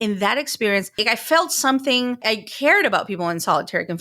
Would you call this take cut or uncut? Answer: cut